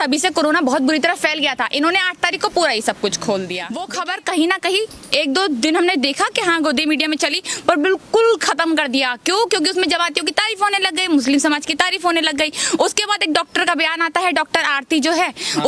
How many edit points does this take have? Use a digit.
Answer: 1